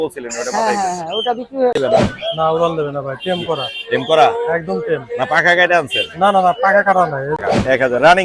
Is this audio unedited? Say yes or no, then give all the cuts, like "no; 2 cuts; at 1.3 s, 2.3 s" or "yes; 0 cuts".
no; 2 cuts; at 1.8 s, 7.4 s